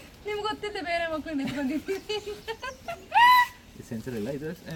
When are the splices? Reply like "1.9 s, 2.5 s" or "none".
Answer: none